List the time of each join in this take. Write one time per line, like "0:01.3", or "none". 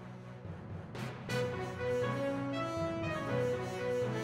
0:01.0

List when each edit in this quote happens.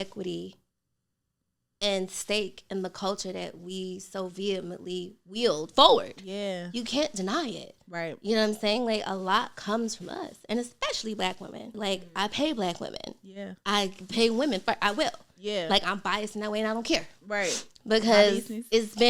0:11.7

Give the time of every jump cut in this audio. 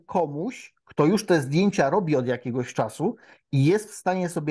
none

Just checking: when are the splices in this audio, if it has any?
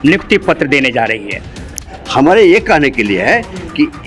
0:01.8

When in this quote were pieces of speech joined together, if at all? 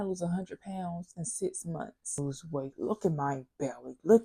0:02.2

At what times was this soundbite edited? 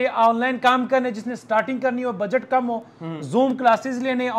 none

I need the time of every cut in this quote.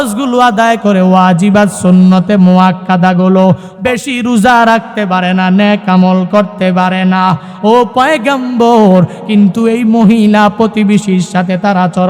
0:03.7

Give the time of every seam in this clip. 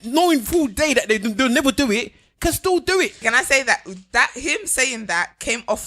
0:03.2

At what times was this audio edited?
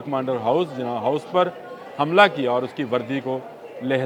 none

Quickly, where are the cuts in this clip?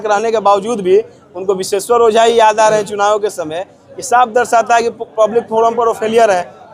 none

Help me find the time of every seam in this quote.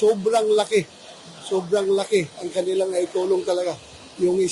none

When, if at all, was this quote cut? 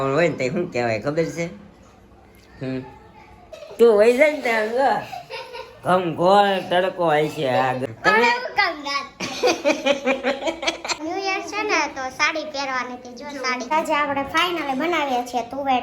0:03.6
0:07.8
0:11.0
0:13.6

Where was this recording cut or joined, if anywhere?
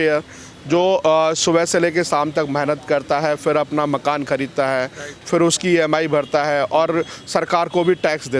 none

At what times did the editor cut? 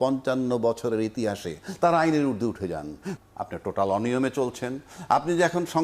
0:03.0

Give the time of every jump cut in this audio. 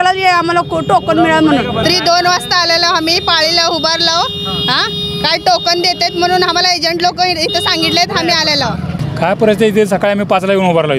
0:01.8
0:09.0

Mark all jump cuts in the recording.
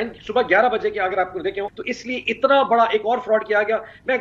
0:01.8

